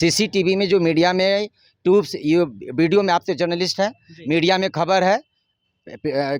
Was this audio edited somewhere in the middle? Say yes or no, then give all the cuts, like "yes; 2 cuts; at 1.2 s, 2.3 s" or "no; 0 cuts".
no; 0 cuts